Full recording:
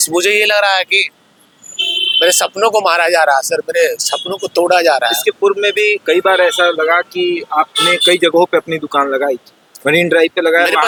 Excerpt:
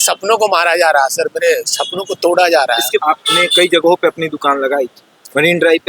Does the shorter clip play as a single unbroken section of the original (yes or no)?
no